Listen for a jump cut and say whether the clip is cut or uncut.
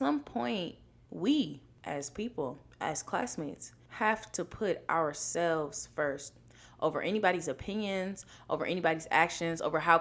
uncut